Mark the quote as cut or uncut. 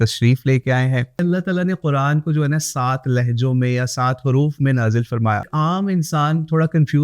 cut